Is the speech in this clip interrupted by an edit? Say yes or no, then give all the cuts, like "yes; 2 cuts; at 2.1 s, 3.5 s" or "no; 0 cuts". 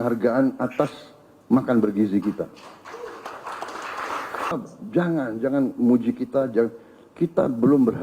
yes; 1 cut; at 4.5 s